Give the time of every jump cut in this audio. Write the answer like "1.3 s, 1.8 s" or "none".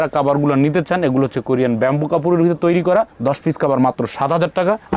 none